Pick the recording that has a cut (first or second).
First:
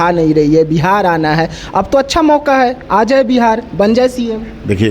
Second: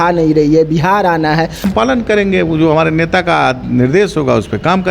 second